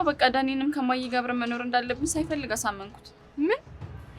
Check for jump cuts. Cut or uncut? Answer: cut